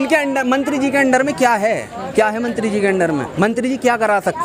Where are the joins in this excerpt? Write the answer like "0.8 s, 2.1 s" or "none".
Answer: none

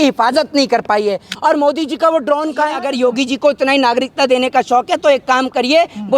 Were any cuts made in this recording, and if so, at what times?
1.3 s, 2.9 s

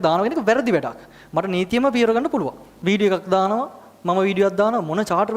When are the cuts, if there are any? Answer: 2.6 s

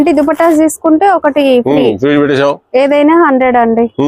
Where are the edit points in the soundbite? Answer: none

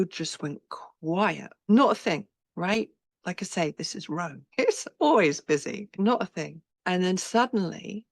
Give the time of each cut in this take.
1.7 s, 2.4 s, 3.1 s, 4.4 s, 5.9 s, 6.6 s

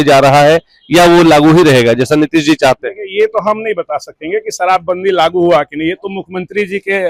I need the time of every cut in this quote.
none

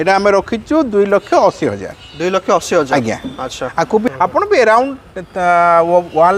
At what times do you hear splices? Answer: 4.0 s

